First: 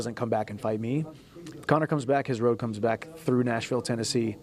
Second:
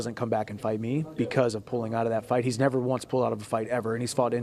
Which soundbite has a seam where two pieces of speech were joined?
first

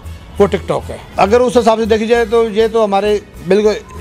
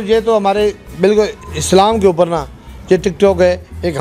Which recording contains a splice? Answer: first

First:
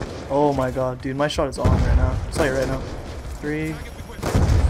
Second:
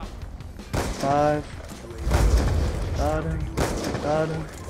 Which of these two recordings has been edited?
second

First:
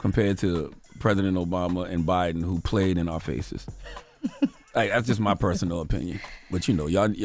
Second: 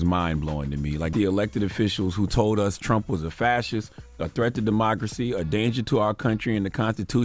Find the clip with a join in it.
second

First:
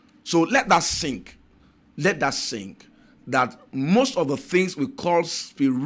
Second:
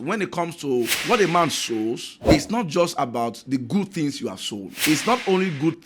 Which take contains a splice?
second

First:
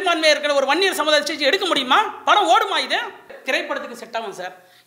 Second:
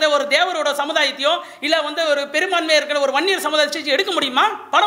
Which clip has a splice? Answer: first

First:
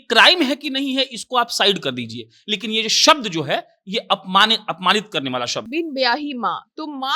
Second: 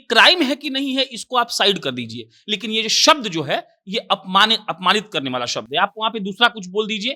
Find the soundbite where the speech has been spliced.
first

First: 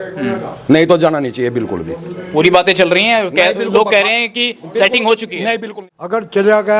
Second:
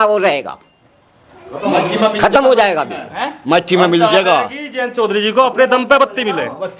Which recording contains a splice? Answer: first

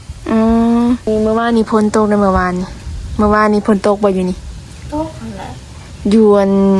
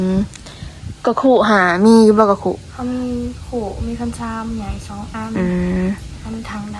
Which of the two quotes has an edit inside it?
first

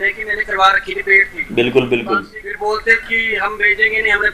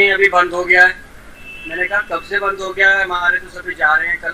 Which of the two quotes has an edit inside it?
first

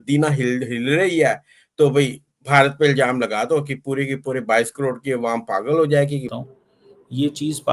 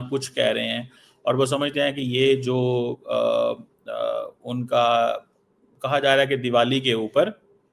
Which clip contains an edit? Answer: first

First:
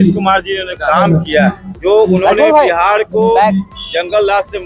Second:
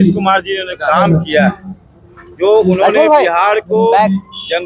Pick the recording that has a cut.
first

